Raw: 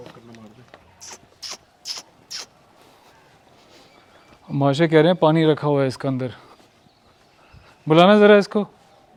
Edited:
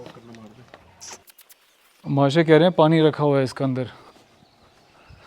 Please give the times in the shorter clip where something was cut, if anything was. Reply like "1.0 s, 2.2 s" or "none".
1.4 s